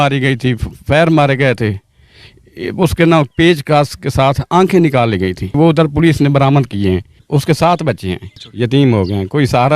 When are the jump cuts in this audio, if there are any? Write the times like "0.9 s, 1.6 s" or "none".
5.5 s, 7.1 s, 8.5 s